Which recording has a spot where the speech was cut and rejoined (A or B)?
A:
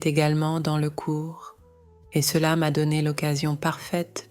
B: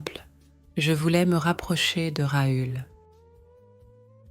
B